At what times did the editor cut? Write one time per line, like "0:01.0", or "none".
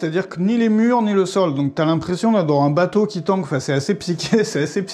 none